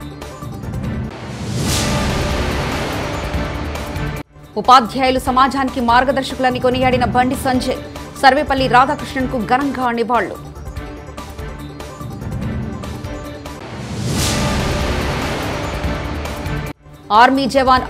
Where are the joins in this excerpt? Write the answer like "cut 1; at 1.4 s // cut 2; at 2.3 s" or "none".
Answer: cut 1; at 1.1 s